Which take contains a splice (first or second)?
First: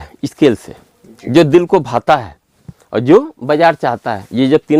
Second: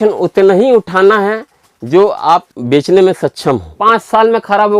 second